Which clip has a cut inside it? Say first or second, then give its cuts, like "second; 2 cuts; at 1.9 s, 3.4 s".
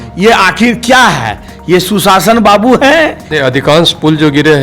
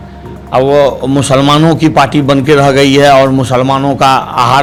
first; 1 cut; at 3.2 s